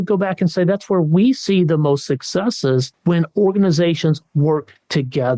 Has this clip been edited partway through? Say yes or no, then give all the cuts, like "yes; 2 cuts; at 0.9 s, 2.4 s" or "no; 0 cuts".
yes; 1 cut; at 2.9 s